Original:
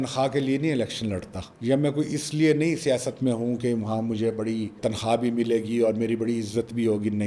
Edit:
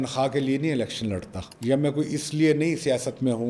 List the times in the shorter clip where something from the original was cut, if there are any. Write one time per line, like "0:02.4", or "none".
none